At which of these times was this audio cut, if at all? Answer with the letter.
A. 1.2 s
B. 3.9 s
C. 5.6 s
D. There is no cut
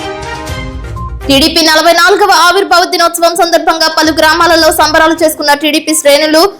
A